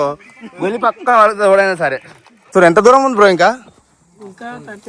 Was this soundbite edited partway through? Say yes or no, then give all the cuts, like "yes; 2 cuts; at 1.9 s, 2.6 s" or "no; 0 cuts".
yes; 1 cut; at 2.5 s